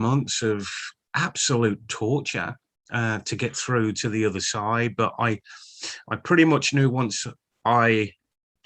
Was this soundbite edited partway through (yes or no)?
no